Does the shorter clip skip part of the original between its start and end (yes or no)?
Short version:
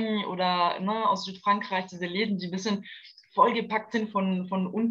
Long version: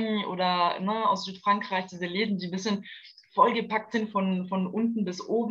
no